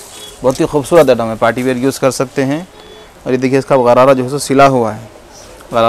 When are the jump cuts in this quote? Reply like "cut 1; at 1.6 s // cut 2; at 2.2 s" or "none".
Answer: none